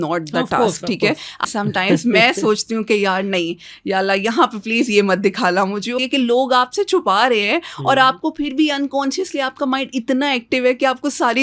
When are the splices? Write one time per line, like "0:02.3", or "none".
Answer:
0:01.4
0:05.9